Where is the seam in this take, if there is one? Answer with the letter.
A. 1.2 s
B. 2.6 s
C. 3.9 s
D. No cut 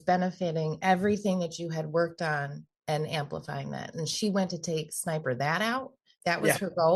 D